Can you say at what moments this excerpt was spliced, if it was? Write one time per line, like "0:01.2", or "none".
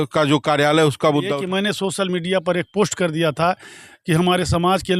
0:01.4